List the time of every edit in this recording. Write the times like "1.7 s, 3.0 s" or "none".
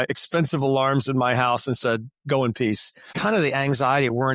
3.1 s